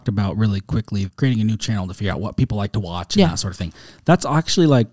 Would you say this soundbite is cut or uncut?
cut